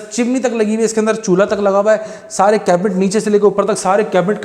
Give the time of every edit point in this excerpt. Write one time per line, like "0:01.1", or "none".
none